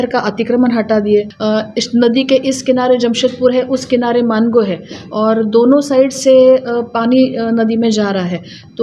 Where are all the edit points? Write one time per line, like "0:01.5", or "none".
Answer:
0:01.3